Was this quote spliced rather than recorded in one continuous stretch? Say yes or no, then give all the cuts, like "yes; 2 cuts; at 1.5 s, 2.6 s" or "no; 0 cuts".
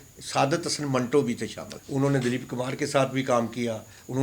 yes; 1 cut; at 1.7 s